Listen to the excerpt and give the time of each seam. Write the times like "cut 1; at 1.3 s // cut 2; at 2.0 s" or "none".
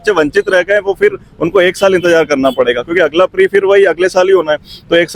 none